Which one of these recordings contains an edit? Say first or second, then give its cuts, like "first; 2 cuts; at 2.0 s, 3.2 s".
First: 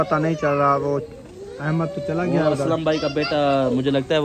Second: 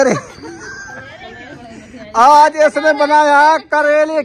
second; 1 cut; at 1.5 s